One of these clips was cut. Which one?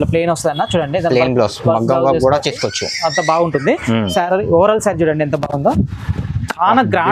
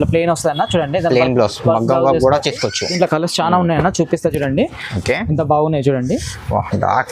second; 1 cut; at 2.8 s

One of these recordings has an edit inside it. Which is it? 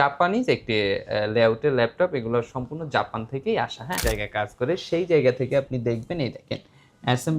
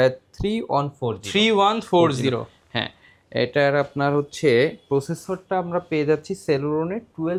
first; 1 cut; at 4.0 s

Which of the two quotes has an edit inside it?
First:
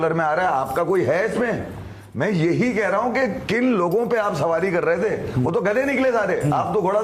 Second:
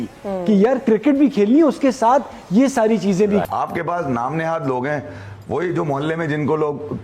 second; 1 cut; at 3.4 s

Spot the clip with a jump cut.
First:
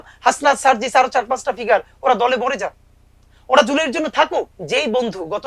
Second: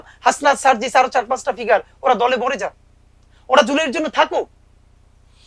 first; 1 cut; at 4.6 s

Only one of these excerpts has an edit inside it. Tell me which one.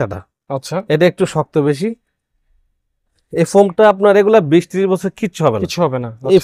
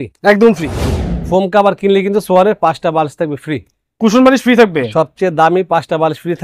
second; 1 cut; at 1.1 s

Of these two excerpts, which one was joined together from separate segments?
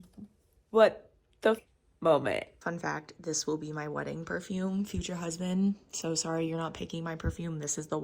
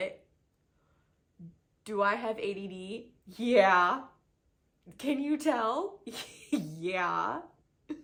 first; 2 cuts; at 1.6 s, 2.6 s

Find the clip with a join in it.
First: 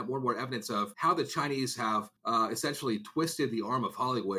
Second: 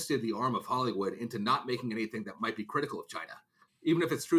first; 2 cuts; at 0.9 s, 2.1 s

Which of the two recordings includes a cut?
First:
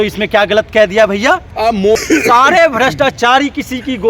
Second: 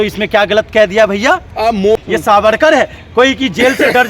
second; 1 cut; at 2.0 s

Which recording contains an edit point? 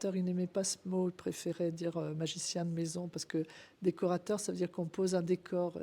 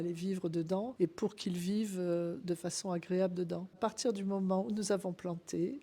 second; 2 cuts; at 0.9 s, 3.8 s

